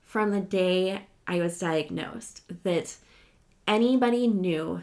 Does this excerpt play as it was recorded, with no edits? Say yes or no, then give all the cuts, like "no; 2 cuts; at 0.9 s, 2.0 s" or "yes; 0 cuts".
yes; 0 cuts